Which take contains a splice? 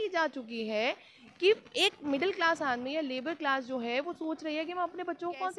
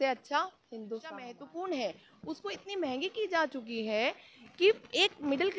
second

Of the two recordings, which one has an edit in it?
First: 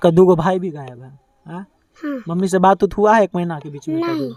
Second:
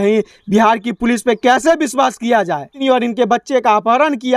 second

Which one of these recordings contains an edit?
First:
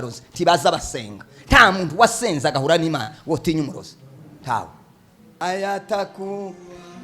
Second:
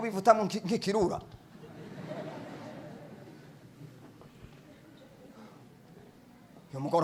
first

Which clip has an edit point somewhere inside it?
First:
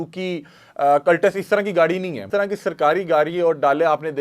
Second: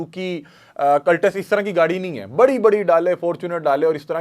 first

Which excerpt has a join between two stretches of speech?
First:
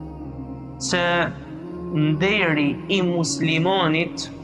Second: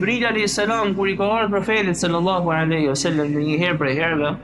first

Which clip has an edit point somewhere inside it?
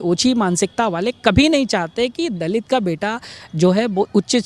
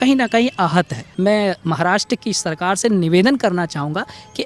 second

